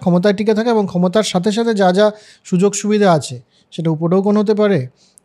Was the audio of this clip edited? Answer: no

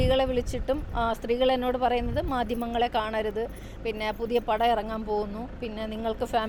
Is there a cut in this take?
no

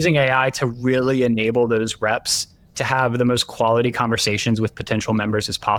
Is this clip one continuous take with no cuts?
yes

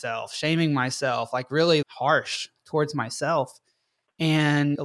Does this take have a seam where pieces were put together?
yes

